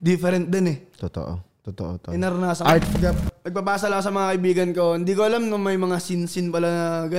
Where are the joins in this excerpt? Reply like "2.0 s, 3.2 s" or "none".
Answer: 2.9 s